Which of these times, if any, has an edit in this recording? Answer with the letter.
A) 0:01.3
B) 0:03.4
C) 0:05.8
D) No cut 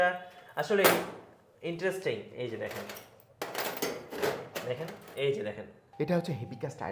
C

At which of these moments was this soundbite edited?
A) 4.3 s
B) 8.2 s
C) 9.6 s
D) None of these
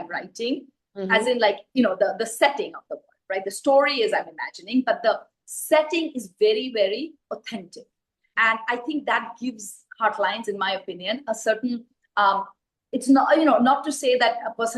D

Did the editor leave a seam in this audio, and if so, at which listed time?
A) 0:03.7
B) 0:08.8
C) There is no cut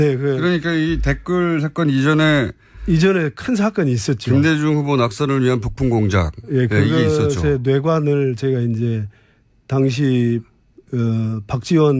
A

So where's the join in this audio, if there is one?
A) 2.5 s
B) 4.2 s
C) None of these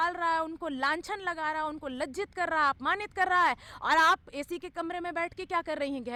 C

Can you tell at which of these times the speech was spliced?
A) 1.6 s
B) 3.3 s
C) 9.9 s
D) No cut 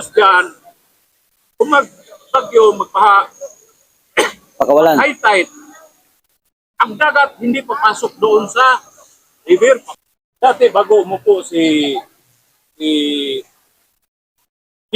C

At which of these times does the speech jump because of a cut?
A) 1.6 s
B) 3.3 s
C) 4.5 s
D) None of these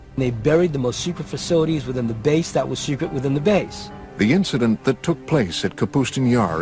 C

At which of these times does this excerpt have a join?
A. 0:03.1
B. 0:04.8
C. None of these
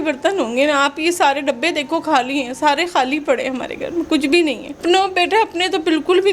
B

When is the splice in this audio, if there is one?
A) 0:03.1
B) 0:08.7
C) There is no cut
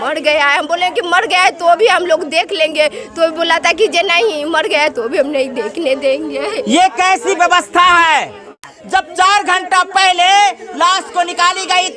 B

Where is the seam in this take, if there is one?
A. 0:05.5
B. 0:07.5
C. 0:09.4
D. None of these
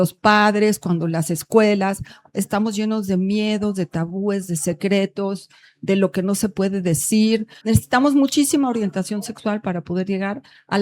B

